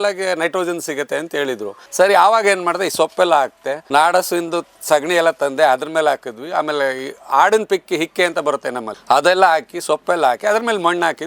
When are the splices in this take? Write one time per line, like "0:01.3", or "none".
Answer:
0:01.8